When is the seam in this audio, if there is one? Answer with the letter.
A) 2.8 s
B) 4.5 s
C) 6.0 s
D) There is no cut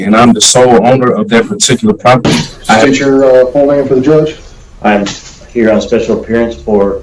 A